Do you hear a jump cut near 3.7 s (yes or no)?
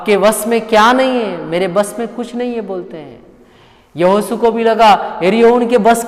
no